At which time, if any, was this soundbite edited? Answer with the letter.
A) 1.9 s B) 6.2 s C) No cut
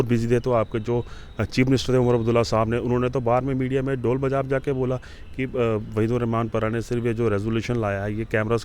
C